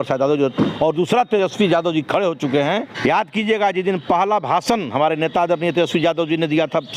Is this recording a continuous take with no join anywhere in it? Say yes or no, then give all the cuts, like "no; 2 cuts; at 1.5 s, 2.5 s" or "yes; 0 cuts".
no; 1 cut; at 2.9 s